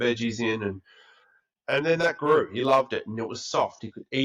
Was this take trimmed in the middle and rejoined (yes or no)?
no